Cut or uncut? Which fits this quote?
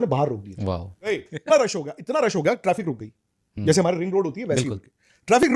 cut